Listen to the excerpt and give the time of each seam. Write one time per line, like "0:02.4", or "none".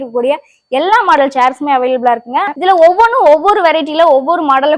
0:02.5